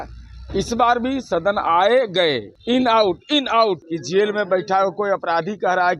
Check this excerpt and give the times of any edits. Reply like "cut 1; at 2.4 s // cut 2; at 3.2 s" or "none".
cut 1; at 2.5 s // cut 2; at 3.9 s